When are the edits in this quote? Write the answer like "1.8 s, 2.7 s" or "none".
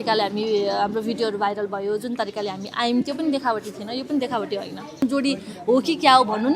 5.0 s